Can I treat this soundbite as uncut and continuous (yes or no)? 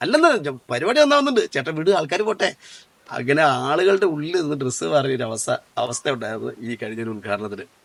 yes